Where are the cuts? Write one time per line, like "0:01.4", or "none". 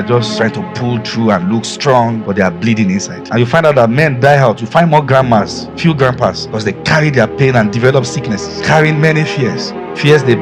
none